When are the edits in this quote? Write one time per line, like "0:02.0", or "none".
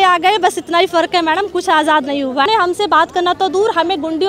0:02.5